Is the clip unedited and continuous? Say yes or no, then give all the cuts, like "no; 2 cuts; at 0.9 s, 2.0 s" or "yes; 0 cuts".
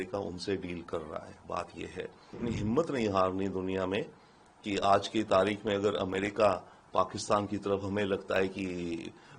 no; 1 cut; at 2.4 s